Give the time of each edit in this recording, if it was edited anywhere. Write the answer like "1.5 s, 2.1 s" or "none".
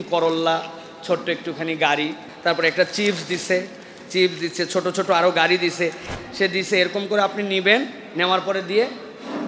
2.2 s, 6.1 s